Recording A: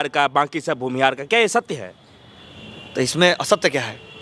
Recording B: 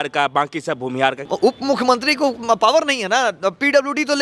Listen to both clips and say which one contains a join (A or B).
B